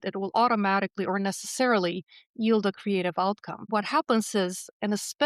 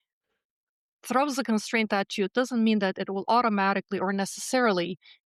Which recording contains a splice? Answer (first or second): first